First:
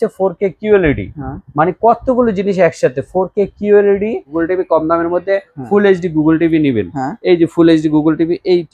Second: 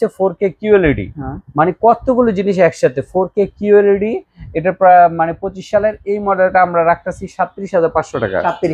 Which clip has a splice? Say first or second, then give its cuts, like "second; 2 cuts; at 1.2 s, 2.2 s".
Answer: first; 1 cut; at 4.3 s